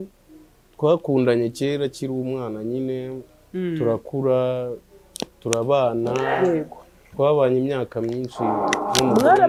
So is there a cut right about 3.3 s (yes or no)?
no